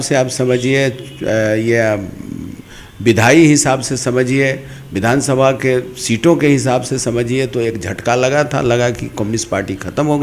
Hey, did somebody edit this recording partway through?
no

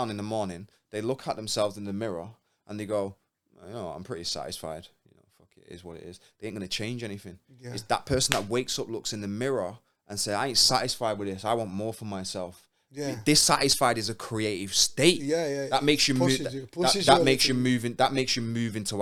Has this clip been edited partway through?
no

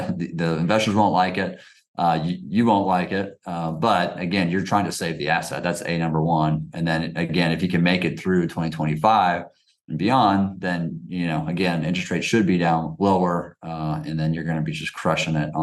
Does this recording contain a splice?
no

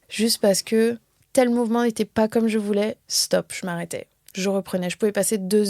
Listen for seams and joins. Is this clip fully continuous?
no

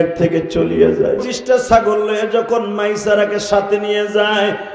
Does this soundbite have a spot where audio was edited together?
yes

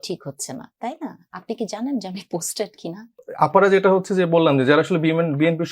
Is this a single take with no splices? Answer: no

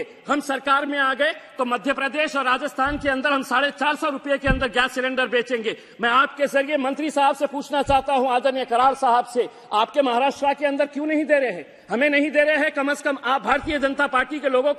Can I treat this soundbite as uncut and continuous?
yes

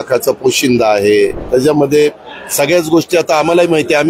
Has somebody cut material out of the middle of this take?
yes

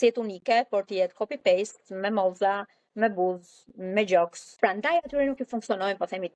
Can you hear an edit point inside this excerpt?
yes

